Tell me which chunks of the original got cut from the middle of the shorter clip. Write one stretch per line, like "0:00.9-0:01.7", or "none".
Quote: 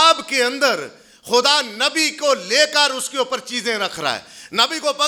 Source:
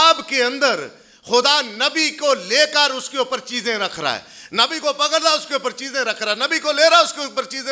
none